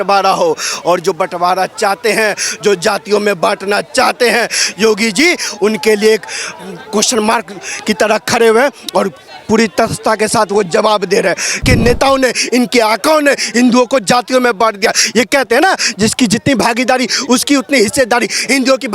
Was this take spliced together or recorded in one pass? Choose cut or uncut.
cut